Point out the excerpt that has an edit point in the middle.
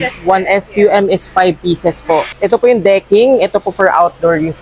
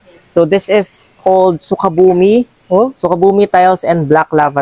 first; 1 cut; at 2.3 s

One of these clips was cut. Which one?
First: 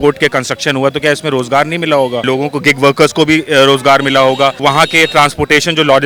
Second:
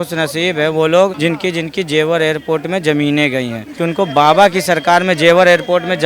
second; 2 cuts; at 1.2 s, 3.6 s

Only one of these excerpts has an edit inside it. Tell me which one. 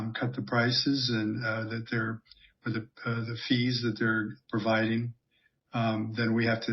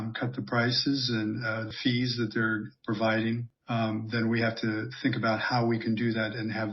second; 2 cuts; at 1.7 s, 3.5 s

